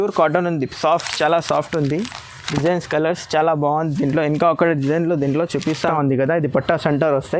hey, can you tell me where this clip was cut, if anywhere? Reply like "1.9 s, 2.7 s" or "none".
5.8 s